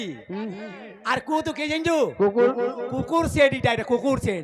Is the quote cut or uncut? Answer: uncut